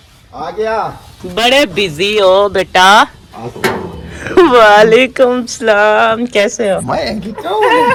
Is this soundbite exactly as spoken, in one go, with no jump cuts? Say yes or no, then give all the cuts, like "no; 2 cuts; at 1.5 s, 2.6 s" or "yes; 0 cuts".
yes; 0 cuts